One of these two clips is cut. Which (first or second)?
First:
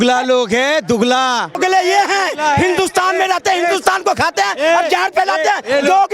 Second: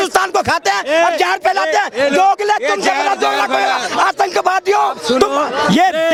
first